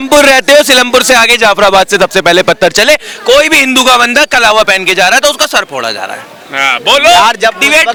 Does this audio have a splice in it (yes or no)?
no